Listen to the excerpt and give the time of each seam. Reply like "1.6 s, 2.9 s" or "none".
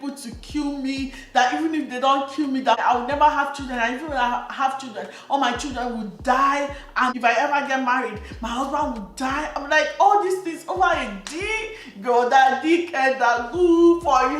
2.8 s, 7.1 s